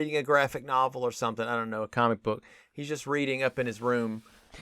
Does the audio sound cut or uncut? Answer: uncut